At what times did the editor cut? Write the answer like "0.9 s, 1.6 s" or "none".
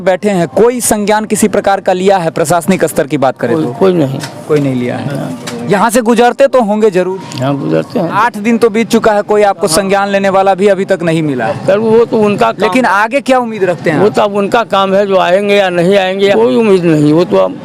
8.1 s, 16.4 s

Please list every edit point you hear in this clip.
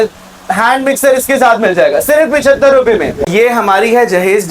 3.3 s

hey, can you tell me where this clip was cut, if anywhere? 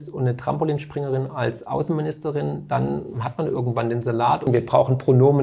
4.4 s

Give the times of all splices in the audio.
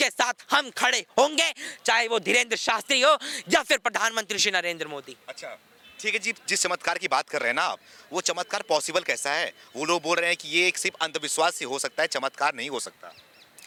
none

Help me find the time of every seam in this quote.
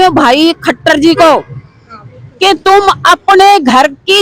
none

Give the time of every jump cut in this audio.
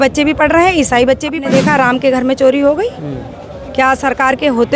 1.4 s

